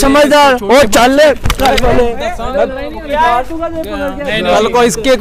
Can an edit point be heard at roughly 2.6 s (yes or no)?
no